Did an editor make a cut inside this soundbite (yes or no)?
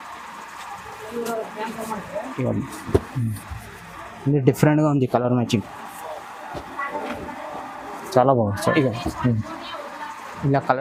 no